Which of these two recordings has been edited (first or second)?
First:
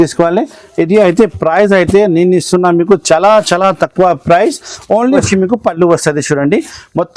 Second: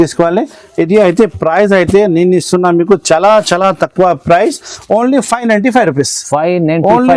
first